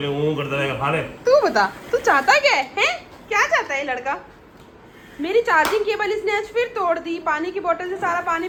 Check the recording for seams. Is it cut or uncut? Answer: uncut